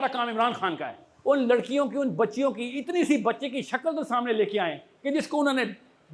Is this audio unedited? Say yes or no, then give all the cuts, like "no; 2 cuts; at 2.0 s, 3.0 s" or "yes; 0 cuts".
no; 1 cut; at 1.1 s